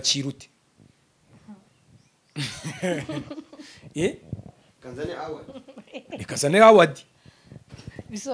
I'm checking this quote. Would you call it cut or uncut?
uncut